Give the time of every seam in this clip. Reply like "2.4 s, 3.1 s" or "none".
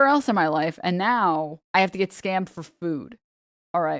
1.6 s